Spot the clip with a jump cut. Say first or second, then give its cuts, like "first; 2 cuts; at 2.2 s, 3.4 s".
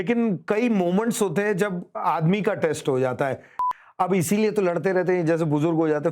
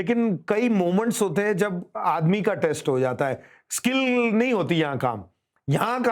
first; 1 cut; at 3.6 s